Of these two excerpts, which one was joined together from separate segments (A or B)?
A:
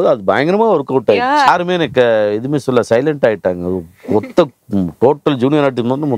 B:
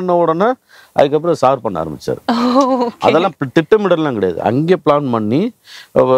A